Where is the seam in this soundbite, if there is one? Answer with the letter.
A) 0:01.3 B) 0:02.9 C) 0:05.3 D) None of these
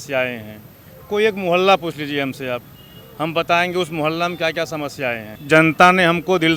C